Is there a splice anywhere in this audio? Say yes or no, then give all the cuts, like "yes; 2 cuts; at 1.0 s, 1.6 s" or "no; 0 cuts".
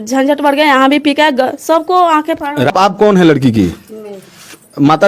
yes; 1 cut; at 2.7 s